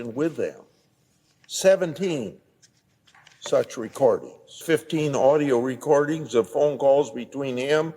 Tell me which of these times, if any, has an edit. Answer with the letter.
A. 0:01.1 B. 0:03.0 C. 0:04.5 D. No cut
C